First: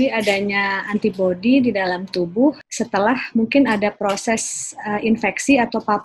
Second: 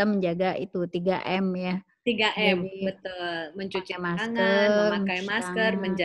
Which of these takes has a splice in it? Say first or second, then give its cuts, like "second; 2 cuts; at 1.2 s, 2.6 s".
first; 1 cut; at 2.7 s